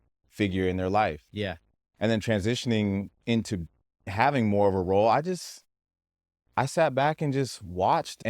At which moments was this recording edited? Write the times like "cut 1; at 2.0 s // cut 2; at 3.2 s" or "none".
cut 1; at 4.1 s